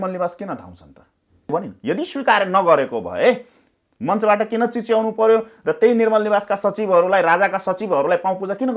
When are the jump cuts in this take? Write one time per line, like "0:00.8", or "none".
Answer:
0:01.5

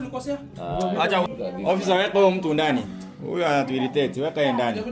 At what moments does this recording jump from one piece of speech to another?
0:01.3

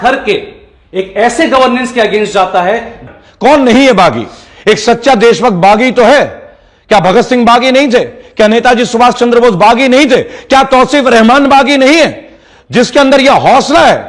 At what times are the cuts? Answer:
0:03.0

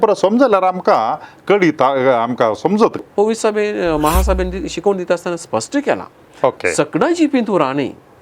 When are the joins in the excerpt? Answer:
0:03.0

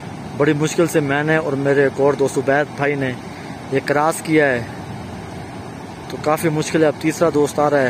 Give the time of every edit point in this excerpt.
none

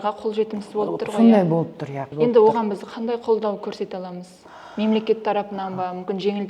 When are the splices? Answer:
0:02.0

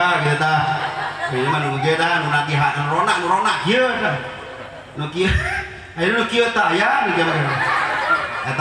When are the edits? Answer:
none

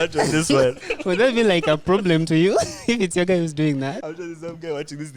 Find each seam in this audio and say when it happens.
0:00.9
0:04.0

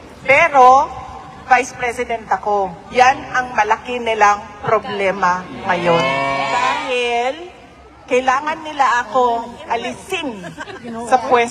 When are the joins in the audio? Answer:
0:06.5

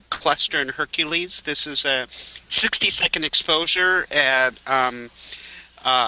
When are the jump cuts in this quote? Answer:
0:03.5

